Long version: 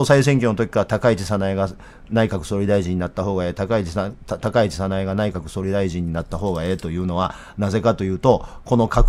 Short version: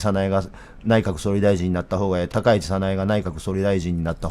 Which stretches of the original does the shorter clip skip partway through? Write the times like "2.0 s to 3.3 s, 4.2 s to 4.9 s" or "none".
3.5 s to 4.4 s